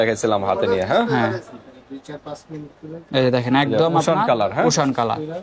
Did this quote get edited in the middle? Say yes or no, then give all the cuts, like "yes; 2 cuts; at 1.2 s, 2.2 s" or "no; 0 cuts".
no; 0 cuts